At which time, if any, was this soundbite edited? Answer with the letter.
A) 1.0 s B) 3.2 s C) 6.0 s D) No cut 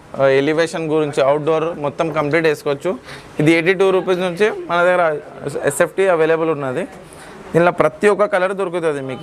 D